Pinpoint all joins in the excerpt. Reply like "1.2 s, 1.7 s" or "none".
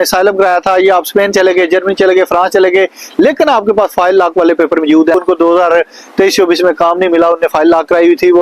5.1 s